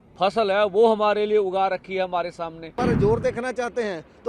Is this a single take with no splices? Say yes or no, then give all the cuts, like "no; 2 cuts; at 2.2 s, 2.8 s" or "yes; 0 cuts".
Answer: no; 1 cut; at 2.8 s